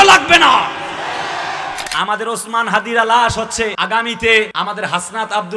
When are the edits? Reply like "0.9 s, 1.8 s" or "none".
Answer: 1.8 s, 3.8 s, 4.5 s